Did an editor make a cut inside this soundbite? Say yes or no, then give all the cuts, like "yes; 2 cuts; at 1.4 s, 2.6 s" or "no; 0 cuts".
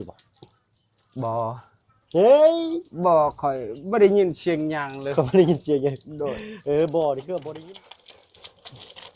yes; 1 cut; at 7.5 s